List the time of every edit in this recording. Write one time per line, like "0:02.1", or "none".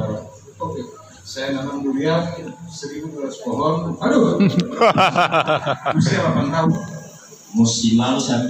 0:06.7